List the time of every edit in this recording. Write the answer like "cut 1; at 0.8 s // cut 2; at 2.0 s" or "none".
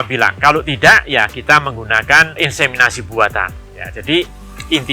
none